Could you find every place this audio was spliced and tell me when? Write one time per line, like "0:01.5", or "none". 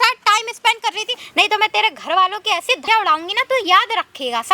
0:01.2
0:02.8